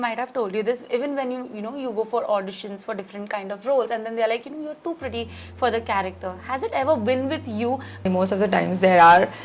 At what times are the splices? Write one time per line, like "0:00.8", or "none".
0:08.0